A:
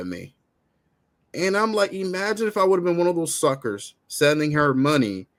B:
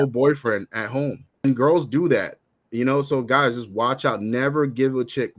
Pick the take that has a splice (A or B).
B